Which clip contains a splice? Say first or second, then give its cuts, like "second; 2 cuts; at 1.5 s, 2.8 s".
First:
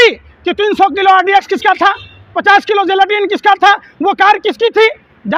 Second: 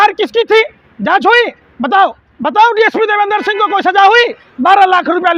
second; 1 cut; at 2.3 s